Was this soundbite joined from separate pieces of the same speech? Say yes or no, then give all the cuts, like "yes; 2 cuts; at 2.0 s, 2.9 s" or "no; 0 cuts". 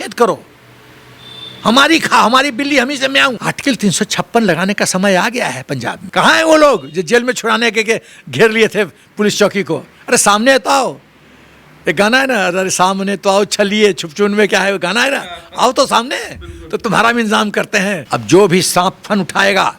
yes; 3 cuts; at 3.4 s, 6.0 s, 18.0 s